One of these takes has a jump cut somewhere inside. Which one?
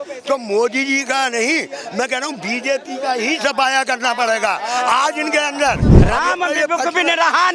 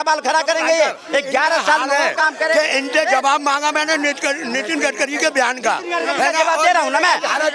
first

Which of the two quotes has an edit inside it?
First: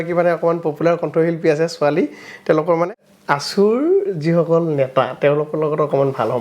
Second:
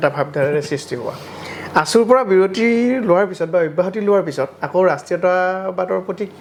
first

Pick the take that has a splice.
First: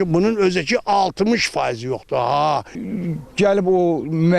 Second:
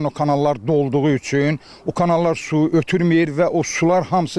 first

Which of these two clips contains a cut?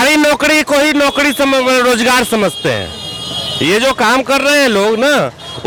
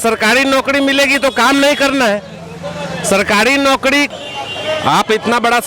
second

